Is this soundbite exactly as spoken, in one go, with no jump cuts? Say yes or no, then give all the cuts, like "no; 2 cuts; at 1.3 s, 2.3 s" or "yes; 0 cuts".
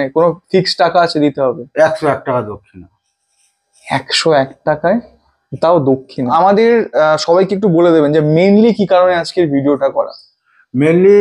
no; 1 cut; at 6.3 s